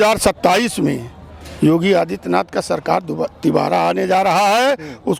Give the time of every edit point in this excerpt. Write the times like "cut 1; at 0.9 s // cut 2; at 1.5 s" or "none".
none